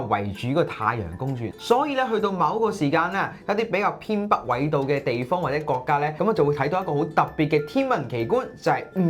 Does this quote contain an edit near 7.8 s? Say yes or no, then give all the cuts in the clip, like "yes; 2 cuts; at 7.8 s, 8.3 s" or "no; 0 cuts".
no; 2 cuts; at 1.5 s, 6.1 s